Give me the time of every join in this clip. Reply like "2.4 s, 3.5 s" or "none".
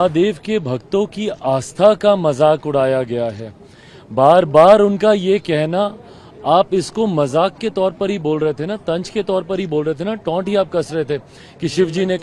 none